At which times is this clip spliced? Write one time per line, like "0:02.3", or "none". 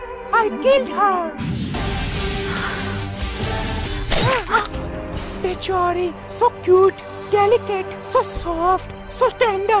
0:03.8